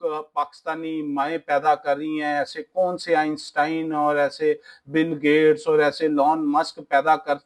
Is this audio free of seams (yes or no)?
yes